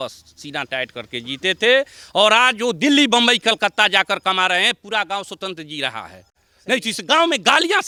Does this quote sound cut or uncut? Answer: uncut